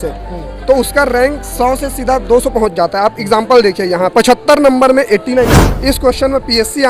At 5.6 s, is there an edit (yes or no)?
yes